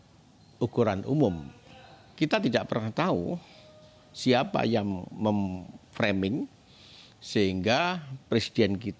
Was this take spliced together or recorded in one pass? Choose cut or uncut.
cut